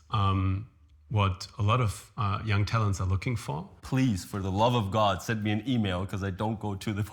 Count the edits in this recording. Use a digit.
1